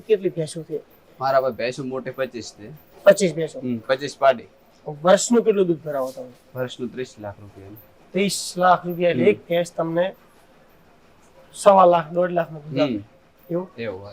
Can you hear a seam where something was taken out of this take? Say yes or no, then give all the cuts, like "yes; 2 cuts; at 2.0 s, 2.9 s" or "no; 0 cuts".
no; 0 cuts